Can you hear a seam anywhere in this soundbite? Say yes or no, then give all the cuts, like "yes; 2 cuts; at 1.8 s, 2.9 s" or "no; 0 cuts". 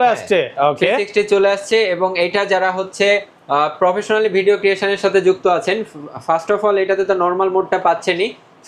no; 0 cuts